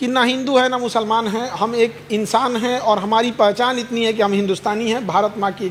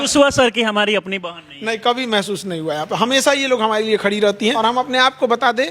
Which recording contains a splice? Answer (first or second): second